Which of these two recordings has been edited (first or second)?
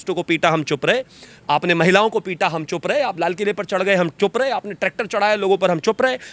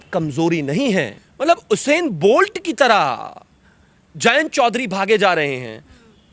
second